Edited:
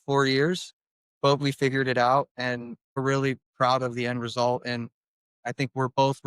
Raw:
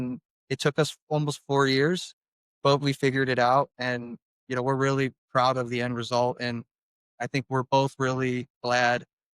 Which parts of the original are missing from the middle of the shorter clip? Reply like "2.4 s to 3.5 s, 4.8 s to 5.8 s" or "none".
4.4 s to 4.7 s